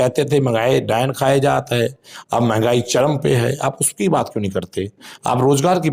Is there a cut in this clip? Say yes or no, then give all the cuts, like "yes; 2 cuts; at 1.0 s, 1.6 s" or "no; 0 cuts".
no; 0 cuts